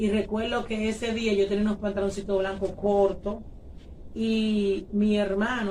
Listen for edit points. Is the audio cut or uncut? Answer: uncut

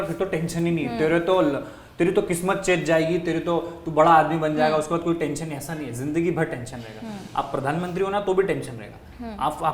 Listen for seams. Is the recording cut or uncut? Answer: uncut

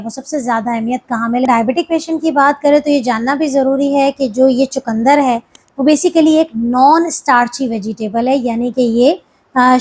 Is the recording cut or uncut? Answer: cut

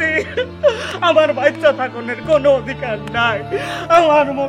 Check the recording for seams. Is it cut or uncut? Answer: uncut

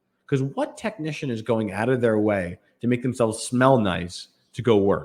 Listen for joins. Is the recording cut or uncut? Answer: uncut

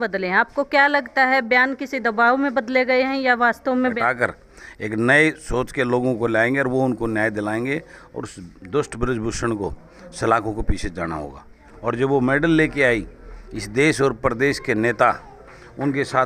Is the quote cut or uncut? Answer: cut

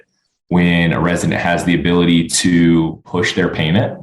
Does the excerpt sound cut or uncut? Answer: cut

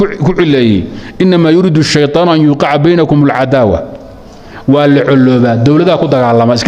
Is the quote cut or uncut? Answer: uncut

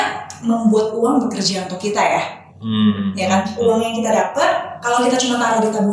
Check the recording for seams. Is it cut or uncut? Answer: uncut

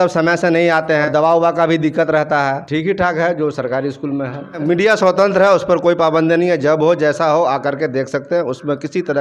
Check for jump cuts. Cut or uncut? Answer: cut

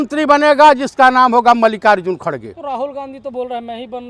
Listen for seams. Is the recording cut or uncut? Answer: uncut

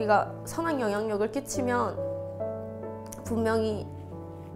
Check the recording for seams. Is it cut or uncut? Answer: uncut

